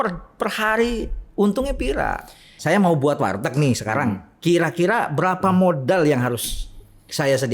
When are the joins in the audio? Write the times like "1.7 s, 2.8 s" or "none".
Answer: 2.5 s